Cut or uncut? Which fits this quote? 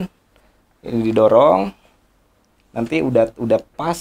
uncut